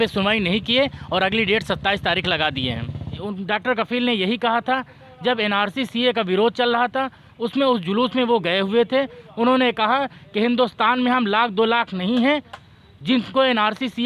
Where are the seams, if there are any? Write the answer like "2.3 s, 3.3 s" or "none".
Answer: 3.2 s